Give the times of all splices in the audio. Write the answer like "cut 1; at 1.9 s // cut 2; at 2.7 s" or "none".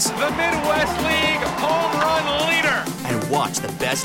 none